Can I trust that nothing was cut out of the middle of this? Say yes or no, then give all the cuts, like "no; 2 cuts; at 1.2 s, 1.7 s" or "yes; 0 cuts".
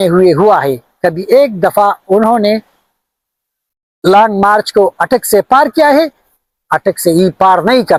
yes; 0 cuts